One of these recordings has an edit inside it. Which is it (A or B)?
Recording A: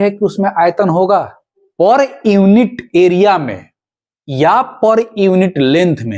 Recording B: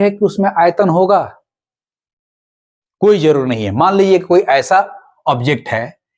A